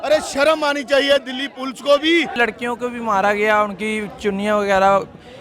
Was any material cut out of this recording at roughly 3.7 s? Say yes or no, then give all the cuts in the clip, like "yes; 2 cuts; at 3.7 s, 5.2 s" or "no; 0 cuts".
no; 1 cut; at 2.4 s